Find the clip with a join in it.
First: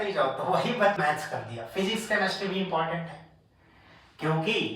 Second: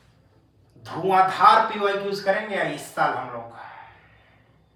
first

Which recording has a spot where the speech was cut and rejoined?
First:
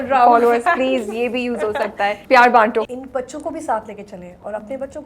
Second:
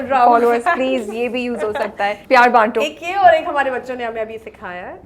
first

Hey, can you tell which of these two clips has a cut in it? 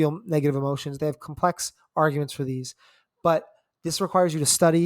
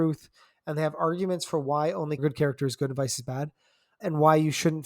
second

